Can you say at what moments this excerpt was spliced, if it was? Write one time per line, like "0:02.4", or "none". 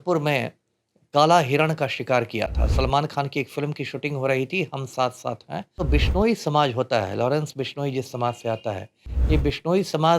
0:05.9